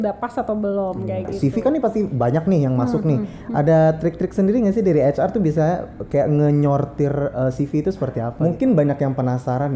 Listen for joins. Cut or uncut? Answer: cut